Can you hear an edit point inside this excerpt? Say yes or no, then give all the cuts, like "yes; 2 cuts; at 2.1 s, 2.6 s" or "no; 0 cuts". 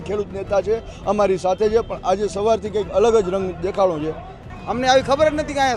yes; 1 cut; at 4.4 s